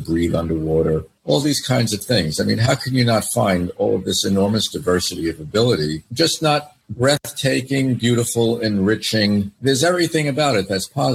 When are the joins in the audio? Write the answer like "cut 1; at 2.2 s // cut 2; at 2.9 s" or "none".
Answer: cut 1; at 3.7 s